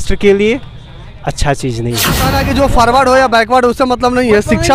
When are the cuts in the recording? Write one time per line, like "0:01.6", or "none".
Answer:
0:02.3